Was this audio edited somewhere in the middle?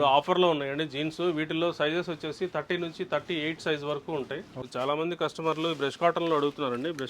yes; 1 cut; at 4.6 s

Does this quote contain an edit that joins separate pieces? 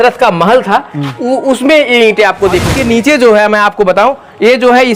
yes; 1 cut; at 2.7 s

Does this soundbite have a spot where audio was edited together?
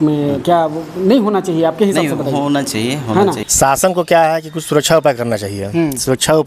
yes; 1 cut; at 3.4 s

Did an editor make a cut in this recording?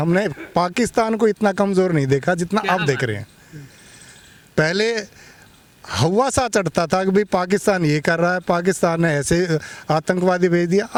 no; 0 cuts

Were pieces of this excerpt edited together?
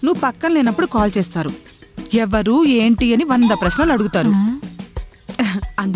no; 0 cuts

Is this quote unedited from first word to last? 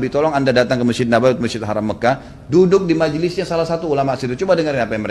yes; 0 cuts

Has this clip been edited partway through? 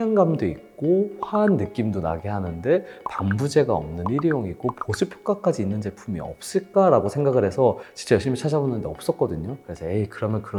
no; 0 cuts

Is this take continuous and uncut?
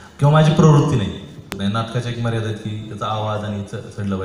no; 1 cut; at 1.5 s

